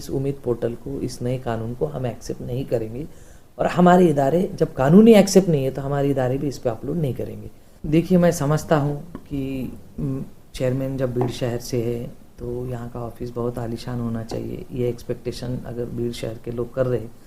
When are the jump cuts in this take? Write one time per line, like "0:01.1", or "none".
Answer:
0:07.8